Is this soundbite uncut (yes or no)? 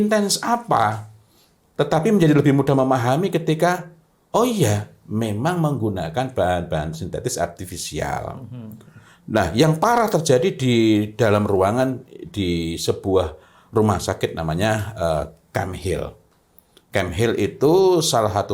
yes